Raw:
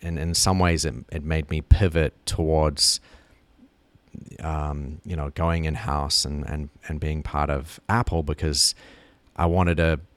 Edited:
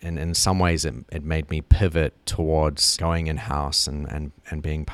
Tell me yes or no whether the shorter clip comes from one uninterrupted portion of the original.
no